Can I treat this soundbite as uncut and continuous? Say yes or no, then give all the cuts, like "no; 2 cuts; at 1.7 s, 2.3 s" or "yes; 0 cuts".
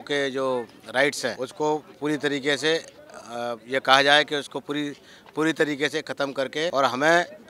no; 3 cuts; at 1.4 s, 3.6 s, 6.7 s